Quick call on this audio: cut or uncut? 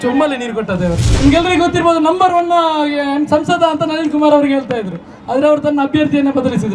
cut